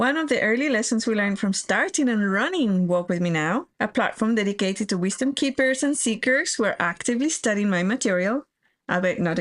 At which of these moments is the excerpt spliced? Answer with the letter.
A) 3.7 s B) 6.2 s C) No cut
A